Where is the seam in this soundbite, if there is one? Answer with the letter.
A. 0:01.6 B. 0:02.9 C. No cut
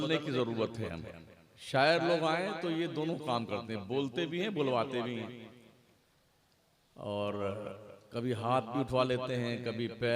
A